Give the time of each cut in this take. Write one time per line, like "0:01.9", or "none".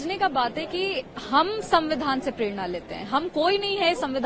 none